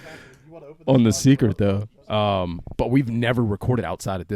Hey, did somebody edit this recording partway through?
yes; 1 cut; at 1.9 s

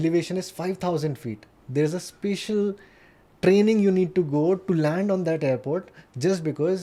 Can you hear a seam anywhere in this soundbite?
no; 0 cuts

